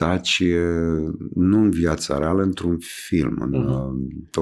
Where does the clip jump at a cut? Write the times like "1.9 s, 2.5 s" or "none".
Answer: none

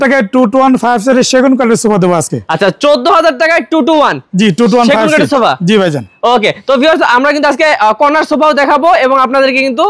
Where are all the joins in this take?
none

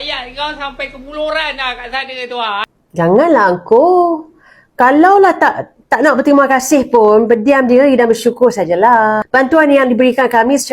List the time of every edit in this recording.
2.6 s

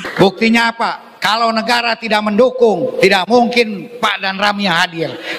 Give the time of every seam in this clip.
1.1 s, 3.8 s

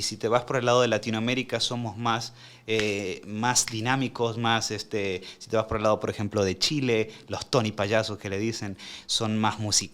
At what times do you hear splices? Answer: none

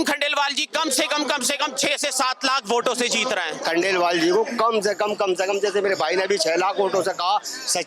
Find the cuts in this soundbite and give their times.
3.6 s

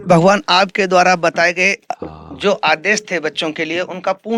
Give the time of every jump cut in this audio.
none

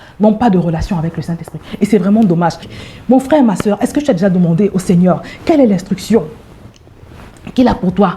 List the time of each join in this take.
2.6 s

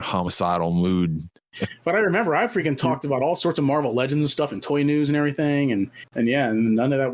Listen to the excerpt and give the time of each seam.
1.4 s, 6.0 s

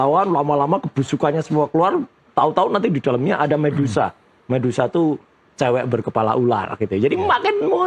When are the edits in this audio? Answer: none

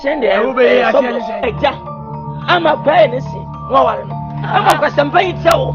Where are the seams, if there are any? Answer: 1.4 s

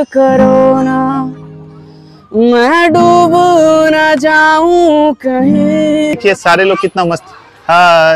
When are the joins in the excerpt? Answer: 6.1 s

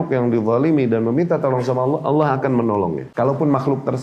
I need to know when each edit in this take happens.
3.1 s

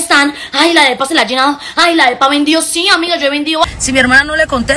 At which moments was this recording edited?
3.7 s

